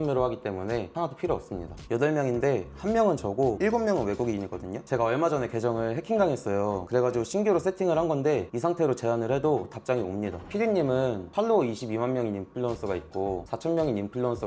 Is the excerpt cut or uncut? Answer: cut